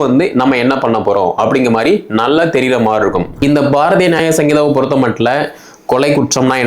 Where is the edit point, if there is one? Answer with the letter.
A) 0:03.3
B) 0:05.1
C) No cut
A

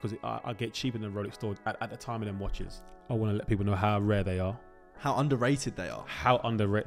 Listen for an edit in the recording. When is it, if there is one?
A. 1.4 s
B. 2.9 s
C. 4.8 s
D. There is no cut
B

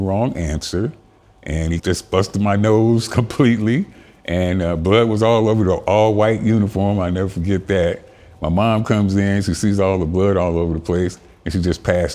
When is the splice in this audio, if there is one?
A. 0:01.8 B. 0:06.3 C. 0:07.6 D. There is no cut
A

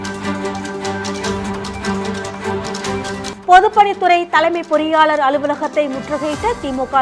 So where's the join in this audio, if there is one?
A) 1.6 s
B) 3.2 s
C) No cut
B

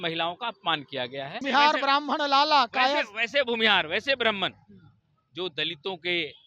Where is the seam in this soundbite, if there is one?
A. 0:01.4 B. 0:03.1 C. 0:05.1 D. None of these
A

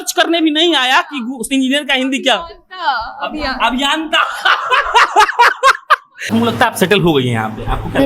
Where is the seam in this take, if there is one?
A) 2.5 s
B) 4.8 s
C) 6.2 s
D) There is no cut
C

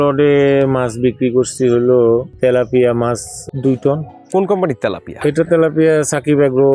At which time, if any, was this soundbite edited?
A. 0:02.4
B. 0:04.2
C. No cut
B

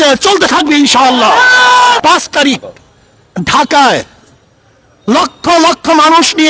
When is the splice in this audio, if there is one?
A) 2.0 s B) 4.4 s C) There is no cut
A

